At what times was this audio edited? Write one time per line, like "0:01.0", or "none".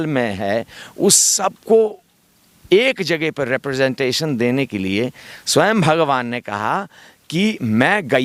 none